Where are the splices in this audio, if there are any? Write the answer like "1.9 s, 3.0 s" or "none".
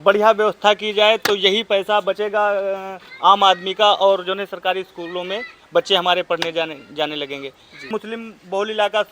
7.9 s